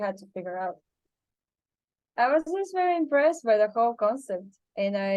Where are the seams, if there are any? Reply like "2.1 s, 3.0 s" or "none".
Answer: 0.9 s